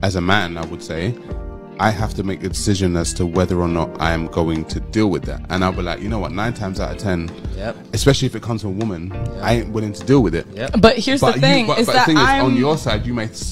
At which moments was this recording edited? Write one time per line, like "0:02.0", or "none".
0:07.8
0:10.5
0:11.8